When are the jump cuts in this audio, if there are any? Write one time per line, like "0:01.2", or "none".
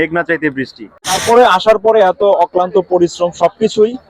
0:01.2

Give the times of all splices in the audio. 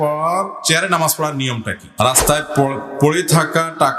0:01.8

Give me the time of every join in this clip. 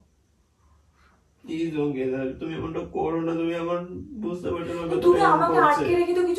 none

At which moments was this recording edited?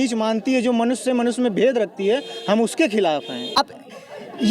0:03.6

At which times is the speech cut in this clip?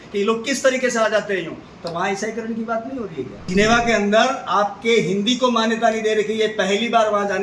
0:03.4

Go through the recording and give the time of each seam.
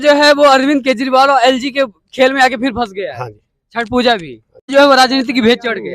0:04.7

